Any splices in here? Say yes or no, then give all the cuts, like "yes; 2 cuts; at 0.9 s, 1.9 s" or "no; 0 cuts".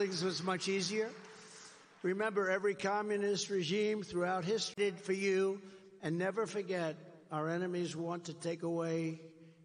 no; 0 cuts